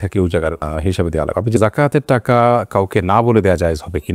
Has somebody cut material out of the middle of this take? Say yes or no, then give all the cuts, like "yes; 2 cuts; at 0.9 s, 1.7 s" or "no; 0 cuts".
yes; 1 cut; at 1.6 s